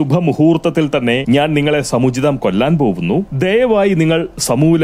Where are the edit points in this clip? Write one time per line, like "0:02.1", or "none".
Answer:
0:01.2